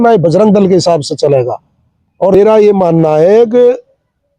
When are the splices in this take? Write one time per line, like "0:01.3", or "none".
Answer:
0:02.3